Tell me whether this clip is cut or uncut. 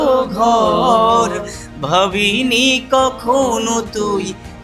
uncut